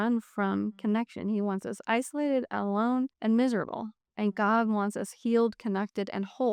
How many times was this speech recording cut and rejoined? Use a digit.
0